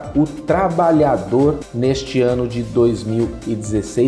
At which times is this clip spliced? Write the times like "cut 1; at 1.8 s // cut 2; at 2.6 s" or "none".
cut 1; at 1.7 s